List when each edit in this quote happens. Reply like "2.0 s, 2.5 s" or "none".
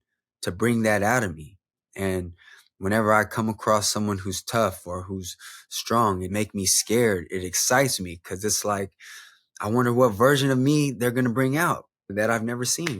6.2 s, 12.1 s